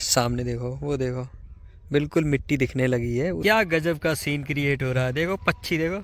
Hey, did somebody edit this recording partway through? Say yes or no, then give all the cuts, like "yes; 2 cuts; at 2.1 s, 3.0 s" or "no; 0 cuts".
yes; 1 cut; at 3.4 s